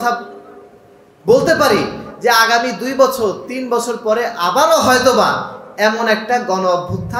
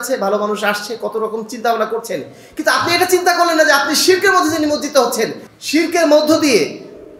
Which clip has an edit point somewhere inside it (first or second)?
second